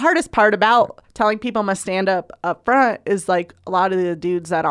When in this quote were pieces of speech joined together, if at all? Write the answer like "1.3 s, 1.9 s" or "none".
1.0 s